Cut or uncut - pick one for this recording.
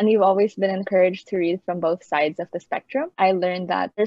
cut